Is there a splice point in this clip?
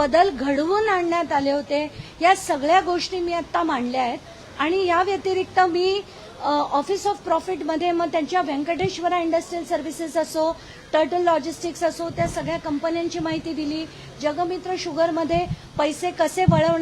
no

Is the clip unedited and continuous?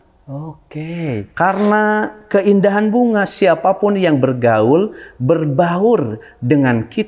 yes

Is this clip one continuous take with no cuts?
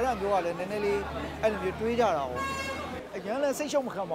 no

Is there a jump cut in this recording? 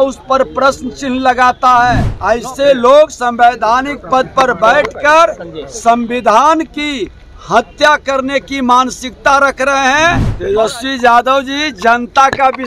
yes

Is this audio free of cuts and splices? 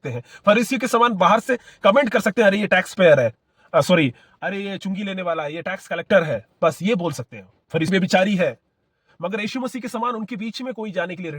no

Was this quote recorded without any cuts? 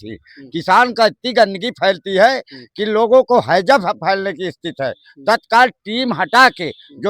yes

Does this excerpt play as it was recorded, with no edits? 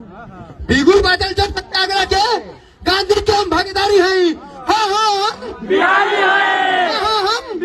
yes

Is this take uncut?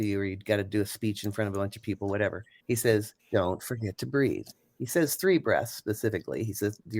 no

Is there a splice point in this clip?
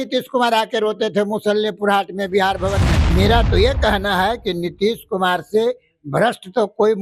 yes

